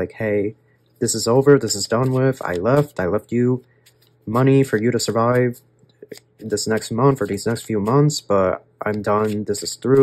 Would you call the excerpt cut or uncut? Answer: uncut